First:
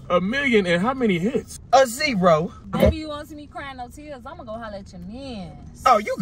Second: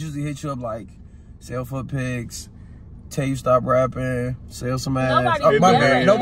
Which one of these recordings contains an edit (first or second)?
first